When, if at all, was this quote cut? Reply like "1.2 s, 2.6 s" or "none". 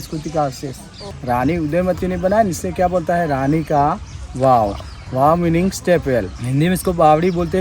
0.9 s, 6.4 s